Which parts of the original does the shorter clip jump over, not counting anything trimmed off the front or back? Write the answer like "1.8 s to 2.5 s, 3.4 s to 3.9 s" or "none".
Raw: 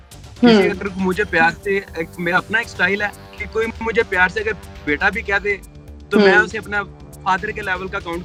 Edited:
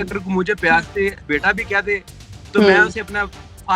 1.9 s to 4.8 s